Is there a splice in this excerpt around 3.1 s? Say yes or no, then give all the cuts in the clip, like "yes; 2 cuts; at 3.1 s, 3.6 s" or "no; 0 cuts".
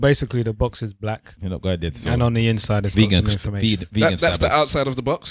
no; 1 cut; at 1.3 s